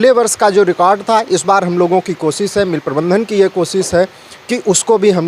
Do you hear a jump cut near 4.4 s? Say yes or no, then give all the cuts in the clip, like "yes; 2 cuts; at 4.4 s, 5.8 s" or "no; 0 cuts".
no; 0 cuts